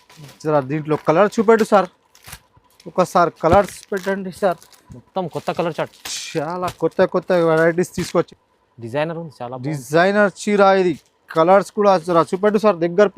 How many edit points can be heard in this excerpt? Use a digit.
2